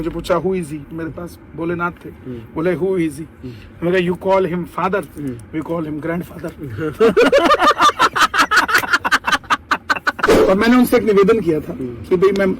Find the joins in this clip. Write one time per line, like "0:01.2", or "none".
0:10.3